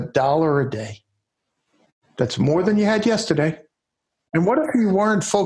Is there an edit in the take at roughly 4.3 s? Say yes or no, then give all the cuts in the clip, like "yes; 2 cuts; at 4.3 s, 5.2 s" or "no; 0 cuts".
yes; 1 cut; at 4.3 s